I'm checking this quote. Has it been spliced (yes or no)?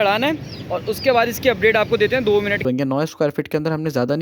yes